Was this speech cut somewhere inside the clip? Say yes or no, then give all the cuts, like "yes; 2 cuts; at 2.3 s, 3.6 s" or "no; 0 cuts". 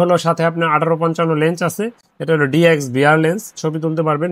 no; 0 cuts